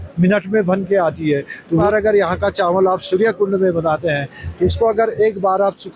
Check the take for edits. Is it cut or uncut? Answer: cut